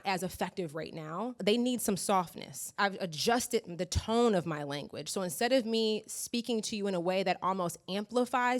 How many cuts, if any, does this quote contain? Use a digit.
2